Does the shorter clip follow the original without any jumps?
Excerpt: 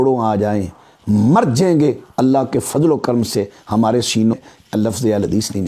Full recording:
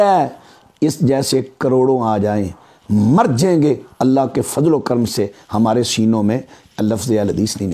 no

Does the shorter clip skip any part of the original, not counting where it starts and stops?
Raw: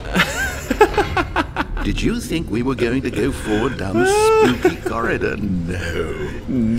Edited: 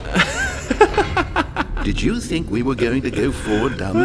no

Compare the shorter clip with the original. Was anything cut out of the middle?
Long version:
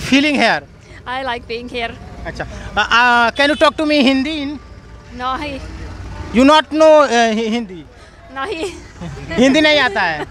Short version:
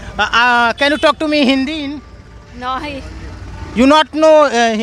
no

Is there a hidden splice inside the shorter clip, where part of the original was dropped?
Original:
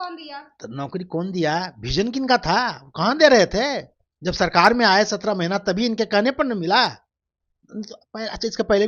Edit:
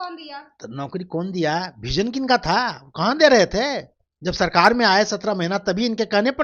no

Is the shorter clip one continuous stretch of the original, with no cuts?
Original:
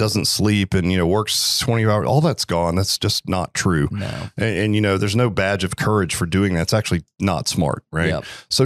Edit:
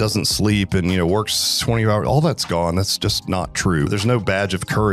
no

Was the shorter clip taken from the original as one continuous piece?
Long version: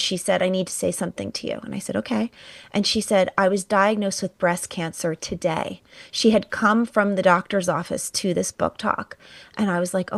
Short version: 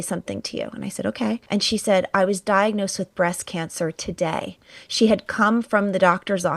no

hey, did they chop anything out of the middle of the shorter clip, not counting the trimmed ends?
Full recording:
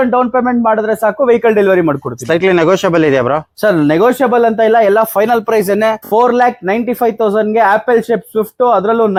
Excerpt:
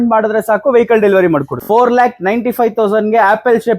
yes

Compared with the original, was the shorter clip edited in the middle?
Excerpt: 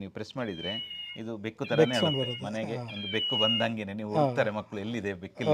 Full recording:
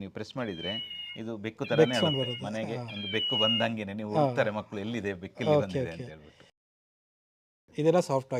no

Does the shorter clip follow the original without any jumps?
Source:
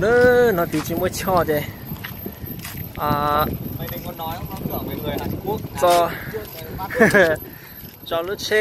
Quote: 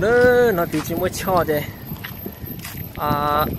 yes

